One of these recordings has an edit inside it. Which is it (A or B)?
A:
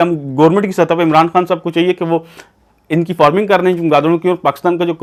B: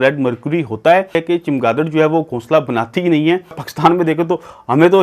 B